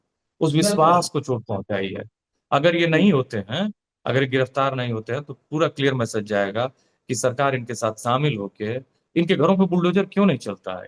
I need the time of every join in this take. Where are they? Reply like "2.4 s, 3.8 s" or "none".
none